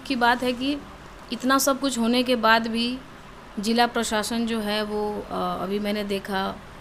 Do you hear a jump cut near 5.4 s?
no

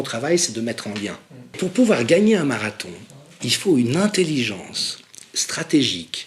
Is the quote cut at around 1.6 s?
yes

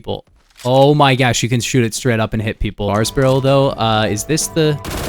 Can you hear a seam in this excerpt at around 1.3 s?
no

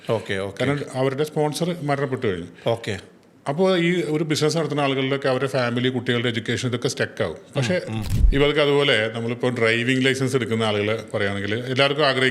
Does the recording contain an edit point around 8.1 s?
yes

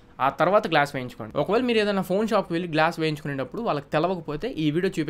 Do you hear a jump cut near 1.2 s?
yes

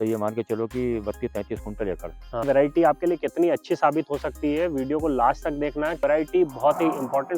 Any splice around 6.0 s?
yes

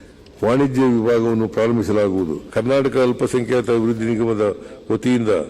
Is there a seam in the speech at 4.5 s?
no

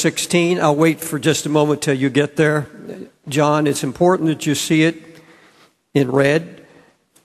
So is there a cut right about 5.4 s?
no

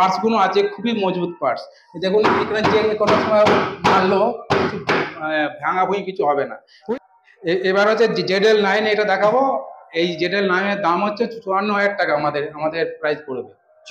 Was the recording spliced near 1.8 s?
no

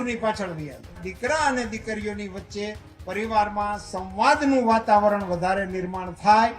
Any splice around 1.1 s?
yes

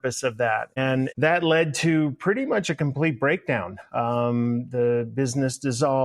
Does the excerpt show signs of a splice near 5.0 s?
no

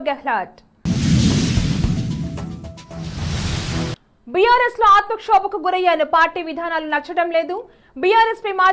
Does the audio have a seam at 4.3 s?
no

